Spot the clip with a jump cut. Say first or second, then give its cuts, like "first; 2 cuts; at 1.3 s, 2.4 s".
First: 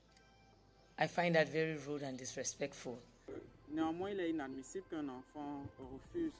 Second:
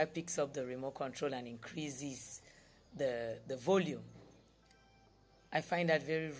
first; 1 cut; at 3.3 s